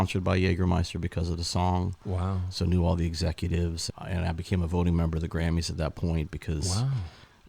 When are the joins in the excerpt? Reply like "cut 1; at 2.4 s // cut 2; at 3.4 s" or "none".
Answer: cut 1; at 3.9 s